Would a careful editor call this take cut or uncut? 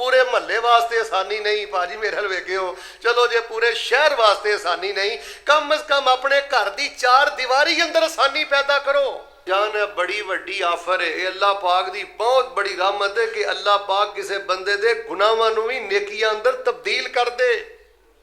cut